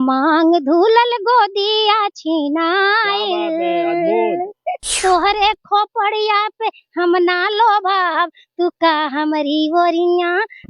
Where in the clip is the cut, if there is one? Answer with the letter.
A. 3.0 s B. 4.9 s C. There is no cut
B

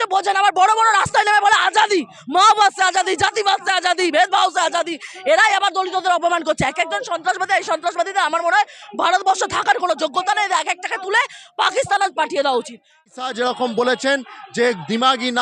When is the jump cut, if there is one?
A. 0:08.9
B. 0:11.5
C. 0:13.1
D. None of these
C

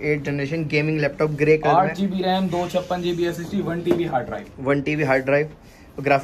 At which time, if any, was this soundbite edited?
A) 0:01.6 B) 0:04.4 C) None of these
C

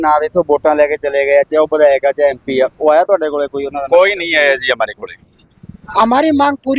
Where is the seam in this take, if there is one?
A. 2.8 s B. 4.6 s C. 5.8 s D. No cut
C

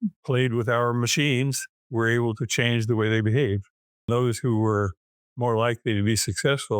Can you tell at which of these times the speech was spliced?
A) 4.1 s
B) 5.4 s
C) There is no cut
A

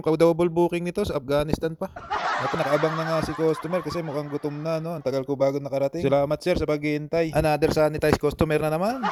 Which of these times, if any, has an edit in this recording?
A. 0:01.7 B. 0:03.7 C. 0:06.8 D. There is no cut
D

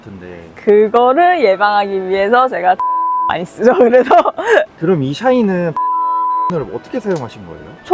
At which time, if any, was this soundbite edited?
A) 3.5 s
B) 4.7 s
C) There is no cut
B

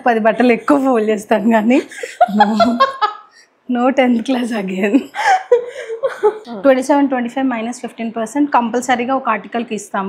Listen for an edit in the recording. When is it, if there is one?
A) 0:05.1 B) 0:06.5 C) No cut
B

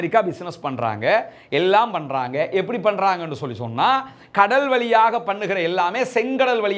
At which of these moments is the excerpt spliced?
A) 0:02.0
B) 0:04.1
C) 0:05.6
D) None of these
D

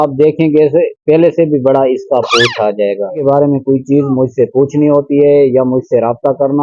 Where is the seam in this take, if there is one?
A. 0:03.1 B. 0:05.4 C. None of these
A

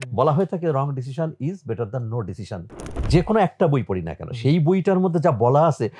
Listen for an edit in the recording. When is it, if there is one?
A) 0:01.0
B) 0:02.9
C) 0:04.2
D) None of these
B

